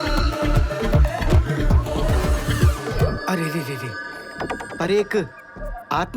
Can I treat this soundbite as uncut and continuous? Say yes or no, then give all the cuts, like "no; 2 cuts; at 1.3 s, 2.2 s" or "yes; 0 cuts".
no; 1 cut; at 2.3 s